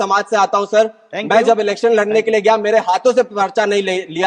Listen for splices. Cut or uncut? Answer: uncut